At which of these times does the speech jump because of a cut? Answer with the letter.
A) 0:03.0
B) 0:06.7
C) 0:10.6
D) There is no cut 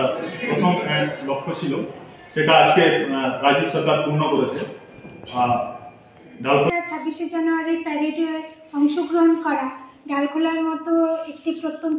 B